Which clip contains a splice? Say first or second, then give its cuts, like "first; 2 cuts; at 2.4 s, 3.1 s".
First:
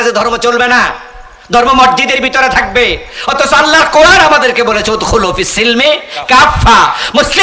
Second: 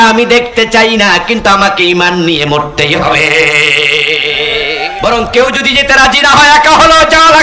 second; 1 cut; at 4.9 s